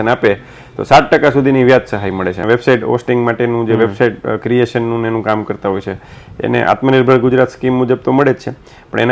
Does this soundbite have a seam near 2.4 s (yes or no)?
yes